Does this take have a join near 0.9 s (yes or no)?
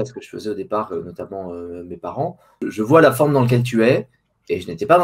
no